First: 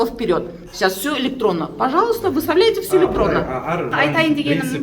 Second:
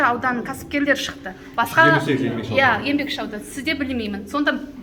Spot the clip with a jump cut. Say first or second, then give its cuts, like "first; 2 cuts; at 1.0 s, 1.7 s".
first; 1 cut; at 3.9 s